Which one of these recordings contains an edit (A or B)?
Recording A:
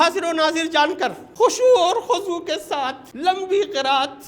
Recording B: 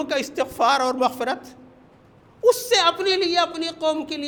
A